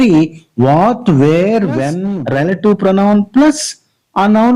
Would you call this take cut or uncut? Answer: cut